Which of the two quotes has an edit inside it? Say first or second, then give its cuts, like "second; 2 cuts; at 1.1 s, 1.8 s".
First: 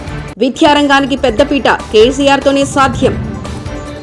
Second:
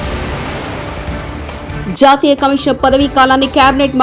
second; 1 cut; at 1.7 s